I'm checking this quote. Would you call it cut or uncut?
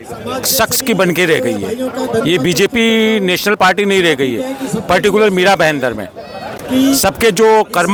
uncut